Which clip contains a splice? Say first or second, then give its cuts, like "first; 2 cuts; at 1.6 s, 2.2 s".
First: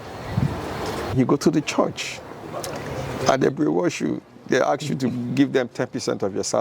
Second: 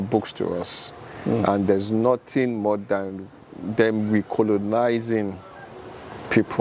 first; 1 cut; at 1.1 s